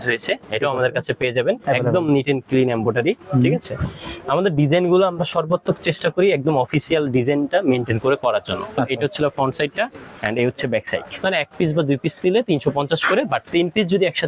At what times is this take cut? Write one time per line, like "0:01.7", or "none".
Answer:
0:08.8
0:11.2